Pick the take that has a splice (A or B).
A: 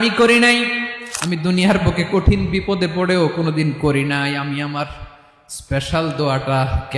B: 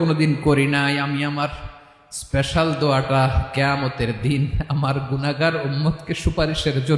A